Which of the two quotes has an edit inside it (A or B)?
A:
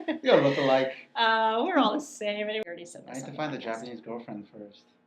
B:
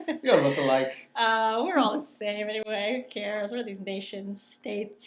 A